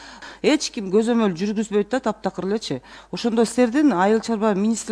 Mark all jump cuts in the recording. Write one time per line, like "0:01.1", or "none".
none